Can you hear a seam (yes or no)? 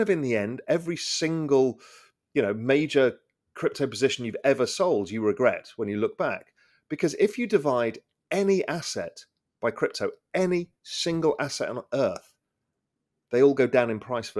no